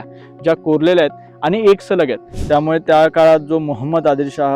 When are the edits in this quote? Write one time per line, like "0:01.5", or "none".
0:02.3